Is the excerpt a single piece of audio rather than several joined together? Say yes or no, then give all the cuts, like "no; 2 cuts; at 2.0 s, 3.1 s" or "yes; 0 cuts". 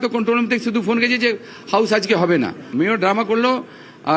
yes; 0 cuts